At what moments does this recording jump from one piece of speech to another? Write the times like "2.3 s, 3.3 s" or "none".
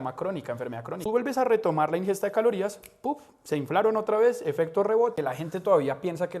1.0 s, 5.1 s